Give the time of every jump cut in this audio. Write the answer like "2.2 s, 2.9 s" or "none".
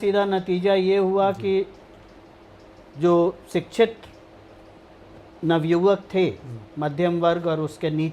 none